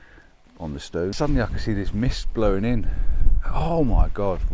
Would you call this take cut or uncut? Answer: cut